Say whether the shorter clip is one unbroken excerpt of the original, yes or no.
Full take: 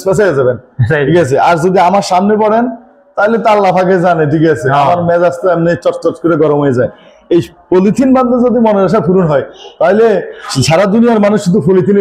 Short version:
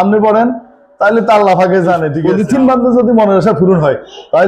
no